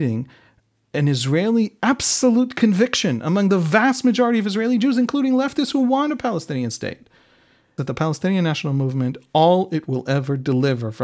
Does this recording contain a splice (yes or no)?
yes